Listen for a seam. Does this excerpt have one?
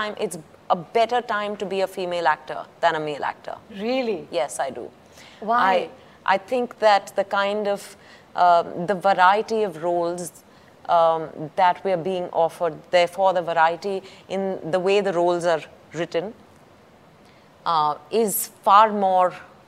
no; 0 cuts

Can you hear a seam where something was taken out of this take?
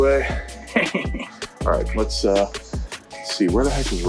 no; 0 cuts

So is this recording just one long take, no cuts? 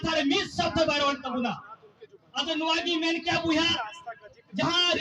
yes; 0 cuts

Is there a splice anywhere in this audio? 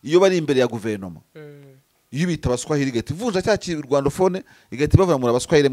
no; 0 cuts

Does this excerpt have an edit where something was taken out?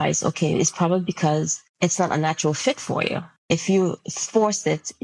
yes; 2 cuts; at 1.6 s, 3.3 s

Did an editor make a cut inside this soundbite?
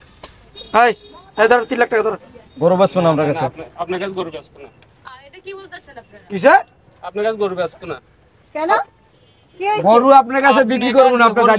no; 0 cuts

